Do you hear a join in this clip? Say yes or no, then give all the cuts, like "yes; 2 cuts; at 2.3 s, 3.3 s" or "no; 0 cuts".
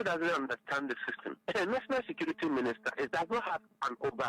yes; 2 cuts; at 1.2 s, 3.1 s